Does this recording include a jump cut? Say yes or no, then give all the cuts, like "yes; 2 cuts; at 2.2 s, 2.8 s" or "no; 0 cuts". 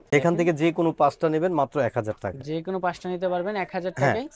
no; 0 cuts